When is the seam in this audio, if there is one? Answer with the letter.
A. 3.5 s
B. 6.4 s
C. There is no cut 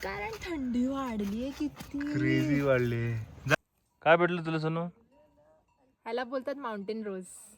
A